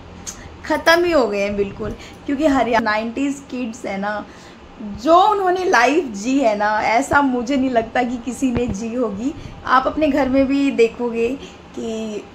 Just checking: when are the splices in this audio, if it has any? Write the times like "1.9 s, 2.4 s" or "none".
2.8 s, 9.5 s